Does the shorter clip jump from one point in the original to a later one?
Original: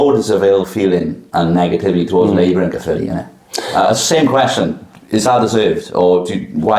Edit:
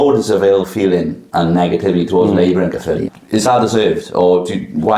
yes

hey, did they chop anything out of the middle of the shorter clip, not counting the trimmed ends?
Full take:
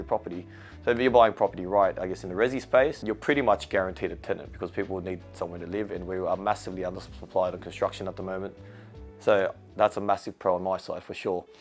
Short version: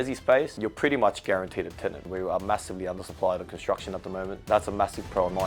yes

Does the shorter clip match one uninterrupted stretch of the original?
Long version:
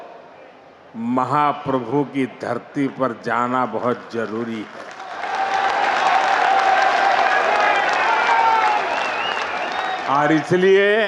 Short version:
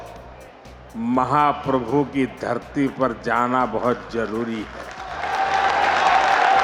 yes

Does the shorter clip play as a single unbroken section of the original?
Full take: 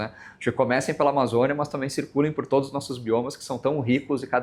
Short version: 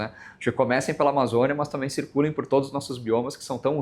yes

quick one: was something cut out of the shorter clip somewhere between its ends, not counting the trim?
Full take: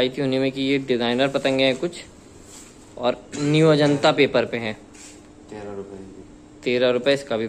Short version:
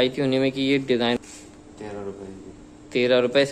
yes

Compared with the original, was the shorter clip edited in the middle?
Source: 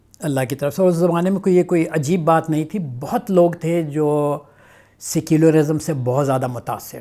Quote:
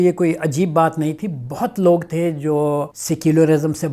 yes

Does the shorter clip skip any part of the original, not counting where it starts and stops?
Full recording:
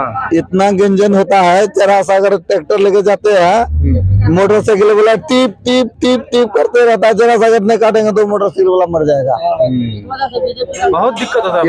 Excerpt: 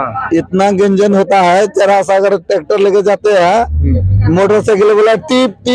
no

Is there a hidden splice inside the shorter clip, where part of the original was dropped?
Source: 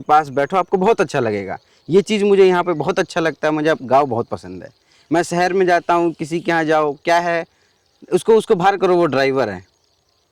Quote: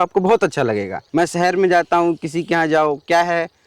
yes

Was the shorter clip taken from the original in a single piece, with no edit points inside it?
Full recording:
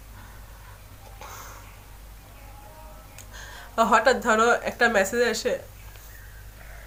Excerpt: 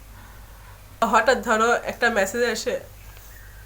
no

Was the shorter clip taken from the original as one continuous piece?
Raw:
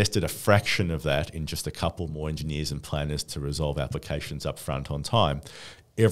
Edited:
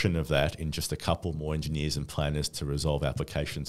yes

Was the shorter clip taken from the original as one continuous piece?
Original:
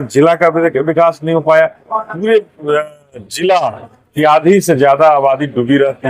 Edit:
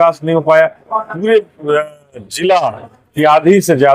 yes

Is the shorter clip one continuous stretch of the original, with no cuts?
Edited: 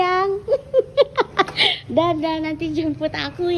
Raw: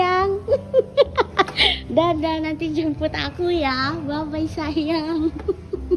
yes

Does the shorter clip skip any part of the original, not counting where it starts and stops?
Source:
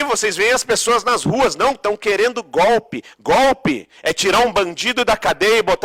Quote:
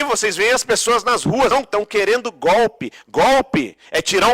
yes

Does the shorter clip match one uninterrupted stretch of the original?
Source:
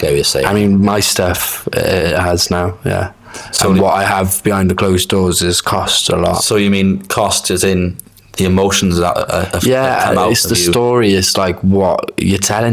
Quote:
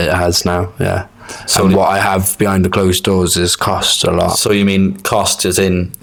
yes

